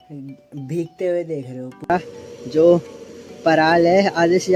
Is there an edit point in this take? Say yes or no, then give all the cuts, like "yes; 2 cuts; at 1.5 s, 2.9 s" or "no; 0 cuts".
yes; 1 cut; at 1.9 s